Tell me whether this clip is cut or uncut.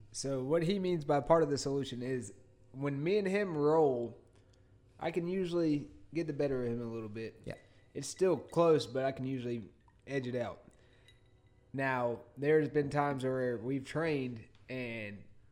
uncut